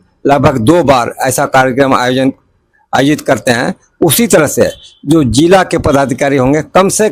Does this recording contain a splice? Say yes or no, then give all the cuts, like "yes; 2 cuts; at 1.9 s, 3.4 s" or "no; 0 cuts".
no; 0 cuts